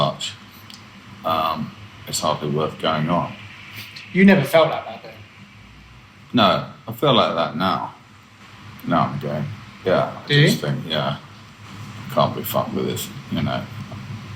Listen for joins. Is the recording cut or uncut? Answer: uncut